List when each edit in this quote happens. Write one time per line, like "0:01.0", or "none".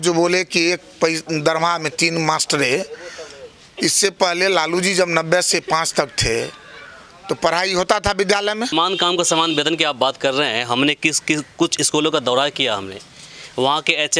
0:08.7